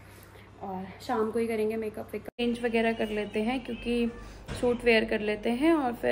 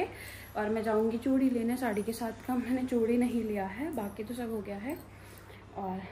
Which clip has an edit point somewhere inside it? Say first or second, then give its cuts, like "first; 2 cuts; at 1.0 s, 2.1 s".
first; 1 cut; at 2.4 s